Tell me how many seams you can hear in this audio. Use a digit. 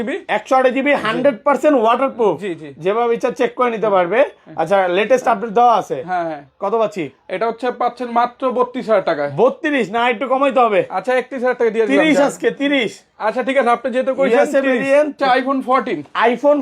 1